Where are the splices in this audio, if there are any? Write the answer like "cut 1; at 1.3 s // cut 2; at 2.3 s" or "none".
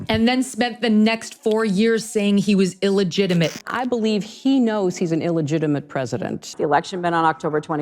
cut 1; at 3.5 s // cut 2; at 6.4 s

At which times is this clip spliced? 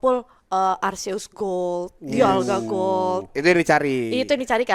none

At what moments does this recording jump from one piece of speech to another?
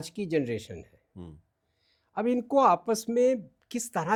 none

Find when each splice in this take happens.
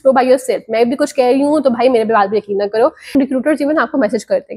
cut 1; at 3.1 s

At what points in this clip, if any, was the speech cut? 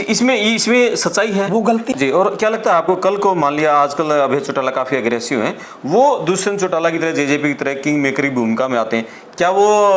cut 1; at 1.9 s

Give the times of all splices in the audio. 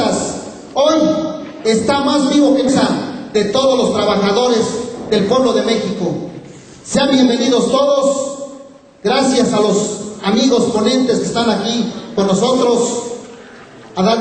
none

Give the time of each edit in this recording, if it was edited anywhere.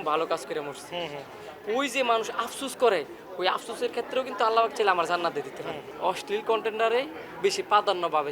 cut 1; at 5.8 s

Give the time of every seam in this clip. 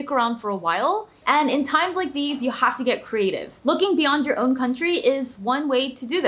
cut 1; at 1.1 s // cut 2; at 3.5 s

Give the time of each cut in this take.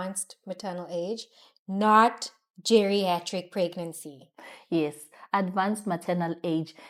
none

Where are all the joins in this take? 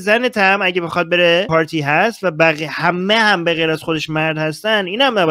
cut 1; at 1.5 s

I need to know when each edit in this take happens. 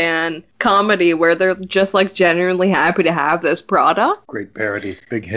cut 1; at 4.3 s

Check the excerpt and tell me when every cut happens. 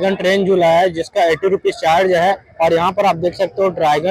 cut 1; at 2.5 s

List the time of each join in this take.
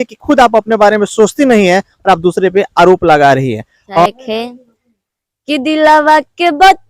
cut 1; at 4.1 s

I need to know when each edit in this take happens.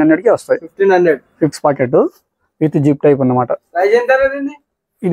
cut 1; at 1.5 s

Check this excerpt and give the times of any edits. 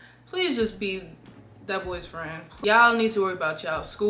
cut 1; at 2.5 s

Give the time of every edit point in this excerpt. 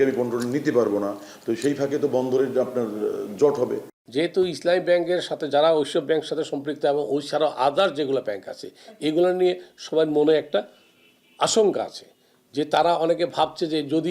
cut 1; at 4.0 s

